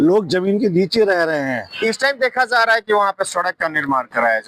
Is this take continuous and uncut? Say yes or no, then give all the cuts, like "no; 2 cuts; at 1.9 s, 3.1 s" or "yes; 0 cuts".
no; 1 cut; at 1.7 s